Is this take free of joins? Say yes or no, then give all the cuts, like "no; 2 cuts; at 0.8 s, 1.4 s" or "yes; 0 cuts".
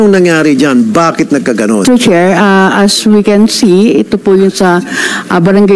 no; 1 cut; at 1.8 s